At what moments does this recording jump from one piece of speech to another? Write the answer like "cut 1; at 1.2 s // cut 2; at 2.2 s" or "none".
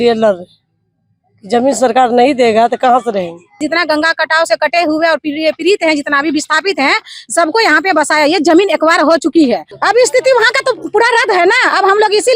cut 1; at 3.6 s // cut 2; at 9.7 s